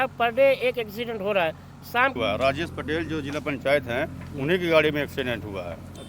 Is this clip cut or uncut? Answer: cut